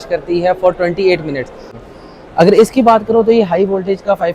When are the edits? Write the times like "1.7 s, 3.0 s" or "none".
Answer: 1.6 s